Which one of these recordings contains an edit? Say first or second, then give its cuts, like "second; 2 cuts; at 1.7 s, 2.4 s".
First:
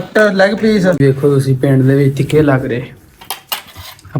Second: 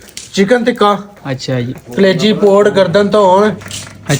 first; 1 cut; at 1.0 s